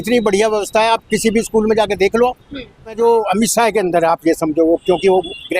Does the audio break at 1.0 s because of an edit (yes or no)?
no